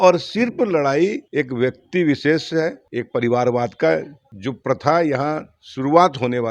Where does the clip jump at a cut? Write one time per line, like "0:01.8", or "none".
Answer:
0:02.9